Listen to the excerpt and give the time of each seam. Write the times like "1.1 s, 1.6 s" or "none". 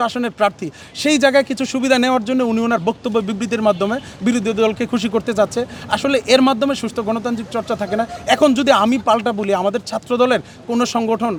none